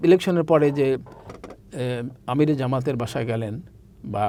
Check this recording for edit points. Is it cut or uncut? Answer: uncut